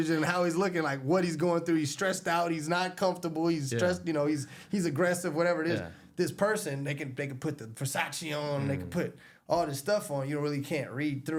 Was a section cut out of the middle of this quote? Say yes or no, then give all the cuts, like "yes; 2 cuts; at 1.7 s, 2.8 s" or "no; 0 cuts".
no; 0 cuts